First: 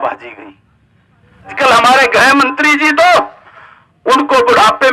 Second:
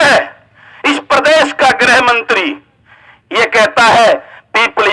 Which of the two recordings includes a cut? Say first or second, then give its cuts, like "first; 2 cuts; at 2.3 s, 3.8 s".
first; 1 cut; at 1.5 s